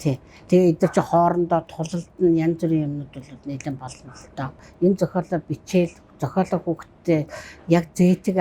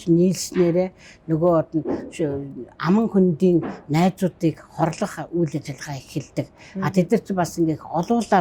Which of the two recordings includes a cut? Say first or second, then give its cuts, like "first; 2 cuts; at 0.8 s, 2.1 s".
first; 1 cut; at 4.5 s